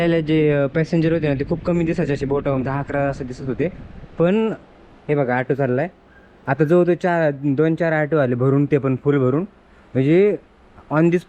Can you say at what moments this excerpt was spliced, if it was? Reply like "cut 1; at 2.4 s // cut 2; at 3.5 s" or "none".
none